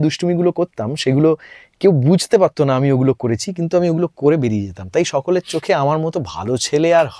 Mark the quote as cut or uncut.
uncut